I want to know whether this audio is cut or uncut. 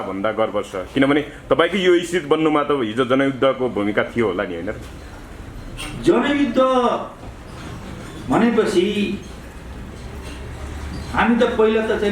uncut